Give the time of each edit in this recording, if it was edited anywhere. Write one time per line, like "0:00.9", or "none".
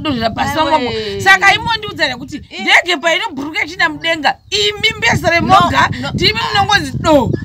none